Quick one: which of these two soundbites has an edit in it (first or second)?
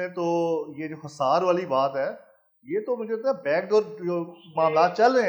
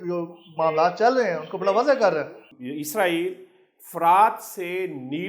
second